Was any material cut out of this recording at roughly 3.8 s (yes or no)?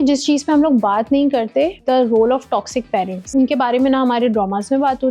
no